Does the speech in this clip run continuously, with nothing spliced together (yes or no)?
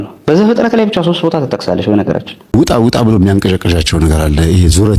no